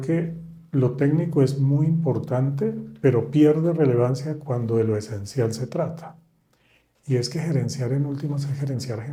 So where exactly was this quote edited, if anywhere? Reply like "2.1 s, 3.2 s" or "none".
none